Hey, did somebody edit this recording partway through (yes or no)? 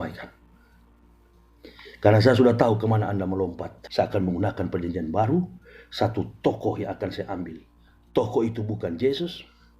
yes